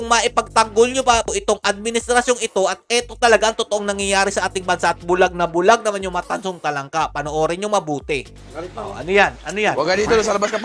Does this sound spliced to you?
no; 0 cuts

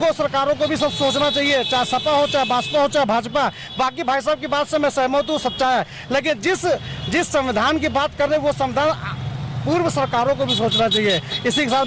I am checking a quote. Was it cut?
no; 0 cuts

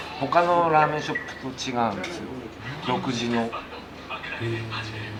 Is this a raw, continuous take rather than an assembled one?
yes; 0 cuts

